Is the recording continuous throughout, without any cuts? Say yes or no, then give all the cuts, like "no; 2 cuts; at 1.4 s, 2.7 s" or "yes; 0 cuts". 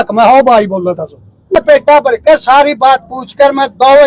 no; 1 cut; at 1.6 s